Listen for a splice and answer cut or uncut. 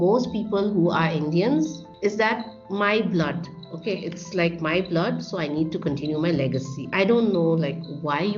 cut